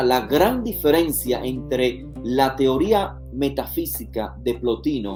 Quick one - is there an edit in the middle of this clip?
no; 0 cuts

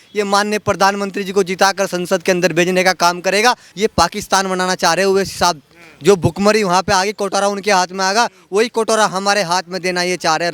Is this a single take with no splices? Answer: no; 1 cut; at 3.7 s

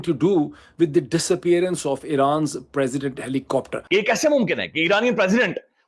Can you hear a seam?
yes; 1 cut; at 3.8 s

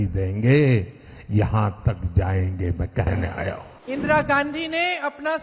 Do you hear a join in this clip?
yes; 1 cut; at 3.7 s

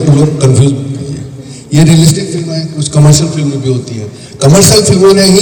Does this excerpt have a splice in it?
no; 0 cuts

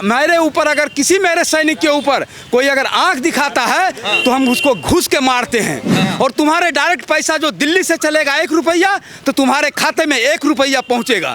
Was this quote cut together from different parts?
yes; 1 cut; at 6.0 s

